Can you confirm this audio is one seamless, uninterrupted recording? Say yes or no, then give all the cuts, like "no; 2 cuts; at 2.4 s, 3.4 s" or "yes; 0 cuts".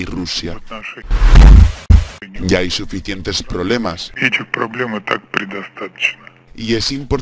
no; 1 cut; at 2.2 s